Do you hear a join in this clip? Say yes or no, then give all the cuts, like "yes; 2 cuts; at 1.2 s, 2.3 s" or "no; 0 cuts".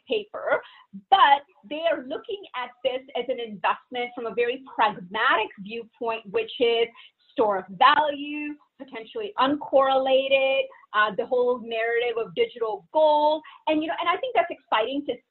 no; 0 cuts